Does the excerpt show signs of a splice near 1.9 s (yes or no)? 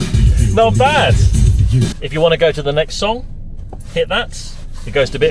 yes